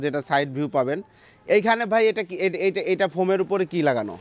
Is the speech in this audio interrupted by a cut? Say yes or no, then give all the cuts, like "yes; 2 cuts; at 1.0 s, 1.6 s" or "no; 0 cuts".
no; 0 cuts